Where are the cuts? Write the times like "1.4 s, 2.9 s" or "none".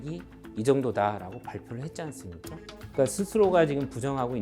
2.8 s